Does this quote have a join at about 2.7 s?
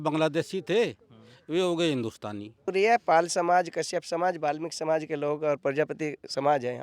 yes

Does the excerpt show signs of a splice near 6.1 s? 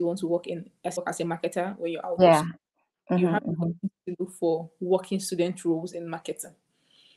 no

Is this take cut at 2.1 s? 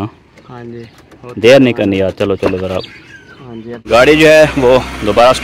no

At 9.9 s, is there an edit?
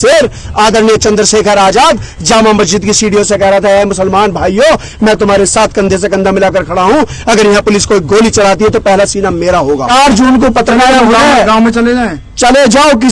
yes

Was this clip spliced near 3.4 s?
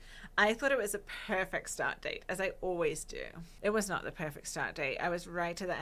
yes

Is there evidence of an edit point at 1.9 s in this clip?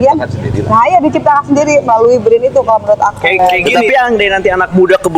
no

